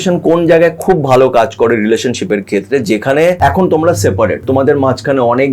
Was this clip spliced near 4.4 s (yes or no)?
yes